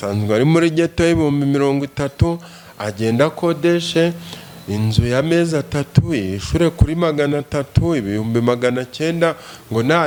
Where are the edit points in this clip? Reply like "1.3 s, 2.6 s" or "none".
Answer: none

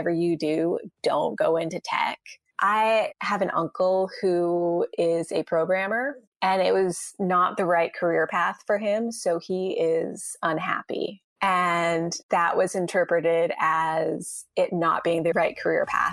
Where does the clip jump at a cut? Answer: 2.3 s, 6.2 s, 11.2 s

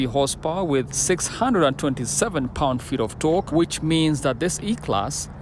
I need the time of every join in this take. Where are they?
0.9 s, 3.5 s

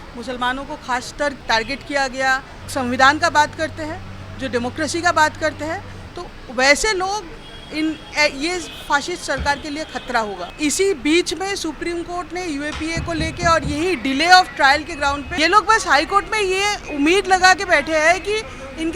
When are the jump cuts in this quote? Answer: 1.4 s, 2.5 s, 10.4 s, 15.3 s

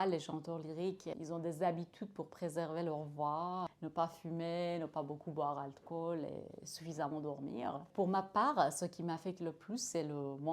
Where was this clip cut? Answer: 1.1 s, 3.7 s, 7.9 s

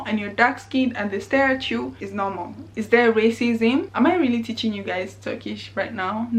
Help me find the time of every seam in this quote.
2.7 s, 3.9 s

